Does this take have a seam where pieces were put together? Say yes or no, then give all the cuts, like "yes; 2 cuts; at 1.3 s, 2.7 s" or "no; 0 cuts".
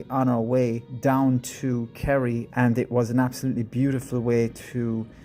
yes; 2 cuts; at 0.9 s, 2.5 s